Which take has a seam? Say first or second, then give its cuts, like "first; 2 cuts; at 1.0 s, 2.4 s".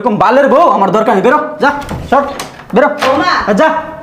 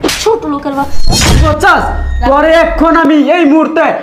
second; 1 cut; at 1.3 s